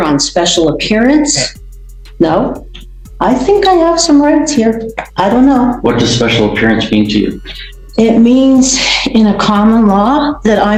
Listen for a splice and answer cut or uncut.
uncut